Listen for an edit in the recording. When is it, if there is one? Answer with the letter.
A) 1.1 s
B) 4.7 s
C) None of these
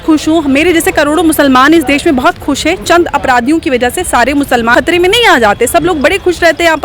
B